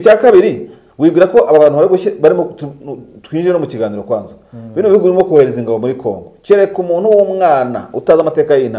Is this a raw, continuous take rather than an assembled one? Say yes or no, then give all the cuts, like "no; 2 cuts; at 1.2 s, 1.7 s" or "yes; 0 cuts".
yes; 0 cuts